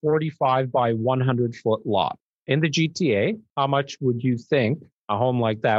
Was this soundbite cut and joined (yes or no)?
yes